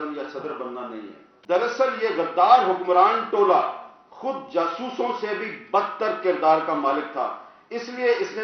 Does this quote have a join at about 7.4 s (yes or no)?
no